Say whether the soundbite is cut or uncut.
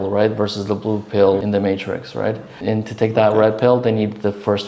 cut